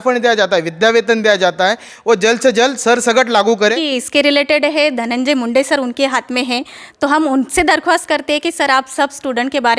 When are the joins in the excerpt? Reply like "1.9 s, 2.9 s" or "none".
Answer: 3.8 s